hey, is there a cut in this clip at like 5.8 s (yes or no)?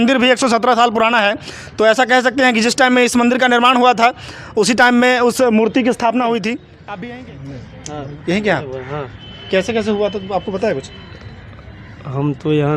no